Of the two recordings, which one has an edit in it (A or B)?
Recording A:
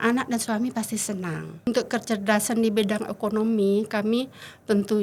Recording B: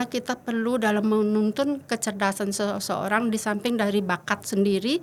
A